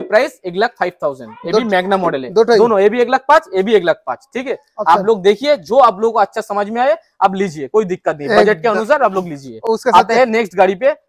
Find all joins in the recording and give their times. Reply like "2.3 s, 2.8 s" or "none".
none